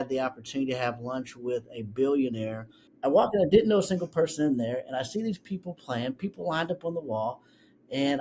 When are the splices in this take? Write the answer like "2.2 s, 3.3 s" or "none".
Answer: 2.9 s